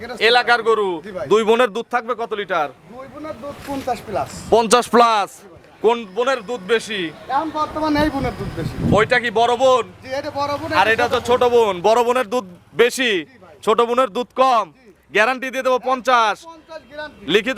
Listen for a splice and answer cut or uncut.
uncut